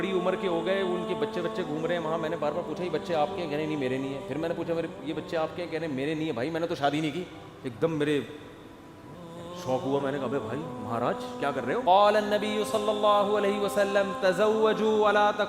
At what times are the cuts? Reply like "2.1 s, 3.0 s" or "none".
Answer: 11.8 s